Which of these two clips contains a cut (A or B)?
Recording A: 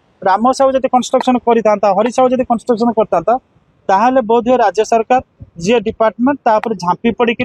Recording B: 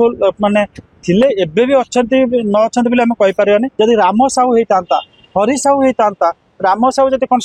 B